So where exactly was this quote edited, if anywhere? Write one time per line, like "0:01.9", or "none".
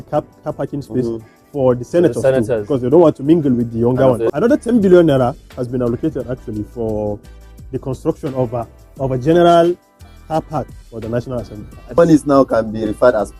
0:04.3
0:12.0